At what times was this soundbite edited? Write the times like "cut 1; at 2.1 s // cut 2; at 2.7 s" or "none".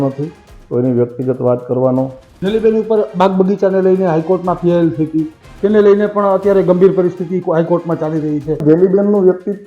cut 1; at 2.2 s // cut 2; at 8.6 s